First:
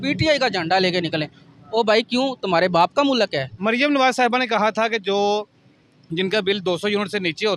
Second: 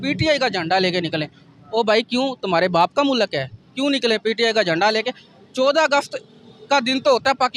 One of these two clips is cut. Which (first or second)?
first